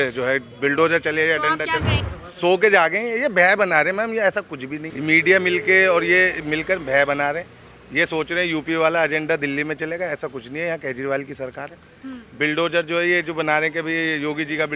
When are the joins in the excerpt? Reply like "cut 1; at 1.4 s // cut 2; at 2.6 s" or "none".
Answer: cut 1; at 2.0 s // cut 2; at 4.8 s

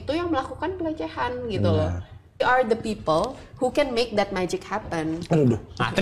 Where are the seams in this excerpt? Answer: cut 1; at 2.4 s

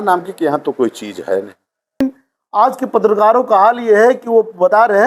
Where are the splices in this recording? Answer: cut 1; at 2.0 s

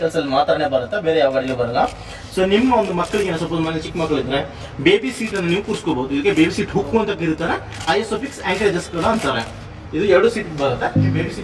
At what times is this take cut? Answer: none

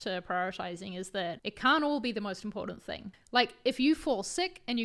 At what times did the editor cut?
cut 1; at 1.5 s // cut 2; at 3.1 s

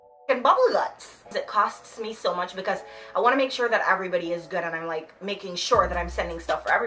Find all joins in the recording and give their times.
cut 1; at 1.3 s

